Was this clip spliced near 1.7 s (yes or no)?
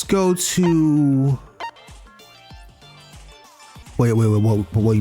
yes